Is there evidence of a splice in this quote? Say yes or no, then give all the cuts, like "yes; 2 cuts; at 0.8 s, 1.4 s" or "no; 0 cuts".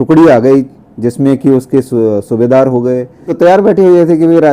yes; 1 cut; at 3.3 s